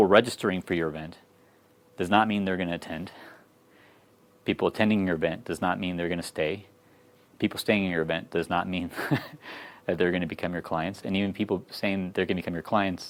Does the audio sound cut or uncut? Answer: uncut